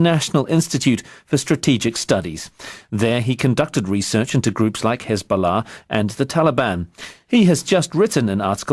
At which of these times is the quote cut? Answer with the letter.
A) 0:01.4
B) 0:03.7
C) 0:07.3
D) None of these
A